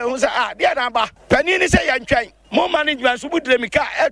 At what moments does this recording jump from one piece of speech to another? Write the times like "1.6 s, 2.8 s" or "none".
1.1 s, 2.4 s

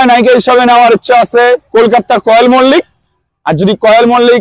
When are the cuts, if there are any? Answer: 1.7 s

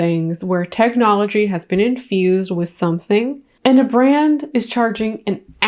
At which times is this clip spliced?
3.5 s

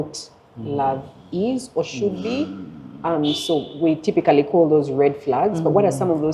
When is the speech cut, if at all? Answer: none

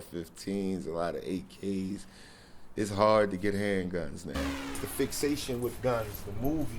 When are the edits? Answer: 4.7 s

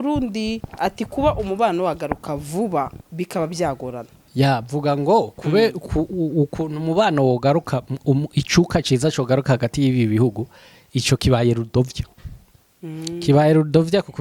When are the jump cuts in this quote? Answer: none

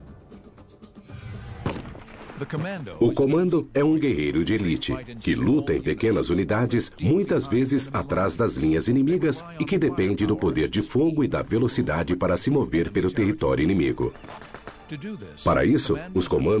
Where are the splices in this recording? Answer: 3.3 s

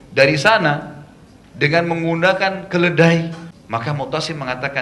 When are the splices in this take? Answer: 3.5 s

